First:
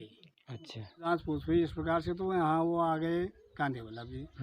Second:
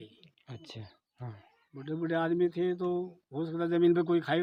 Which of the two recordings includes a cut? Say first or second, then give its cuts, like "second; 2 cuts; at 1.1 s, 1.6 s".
first; 1 cut; at 1.1 s